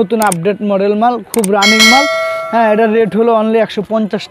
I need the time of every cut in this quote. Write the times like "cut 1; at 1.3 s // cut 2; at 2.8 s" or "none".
none